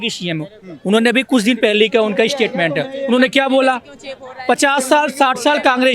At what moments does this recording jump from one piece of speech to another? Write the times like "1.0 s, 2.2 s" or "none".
none

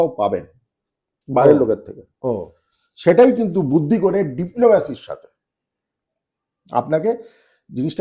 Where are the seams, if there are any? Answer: none

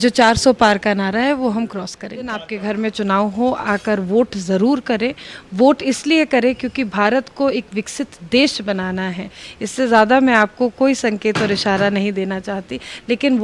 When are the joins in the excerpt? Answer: 2.5 s

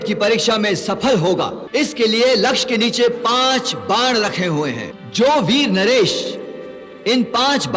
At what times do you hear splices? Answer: 1.6 s, 4.9 s

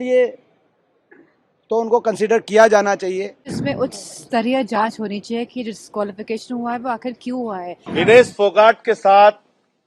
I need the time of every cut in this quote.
3.6 s, 7.8 s

